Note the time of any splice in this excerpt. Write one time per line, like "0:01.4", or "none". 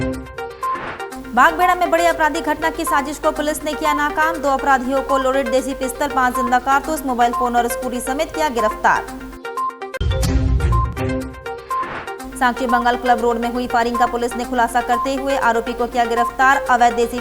0:01.1